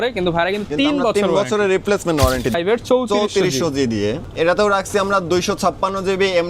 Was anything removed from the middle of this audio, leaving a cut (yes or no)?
yes